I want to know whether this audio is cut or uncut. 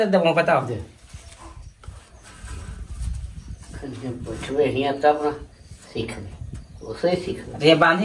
uncut